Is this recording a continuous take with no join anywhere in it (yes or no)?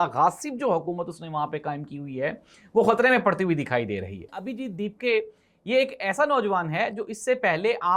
no